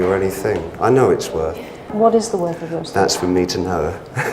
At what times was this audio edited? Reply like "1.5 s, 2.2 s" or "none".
1.9 s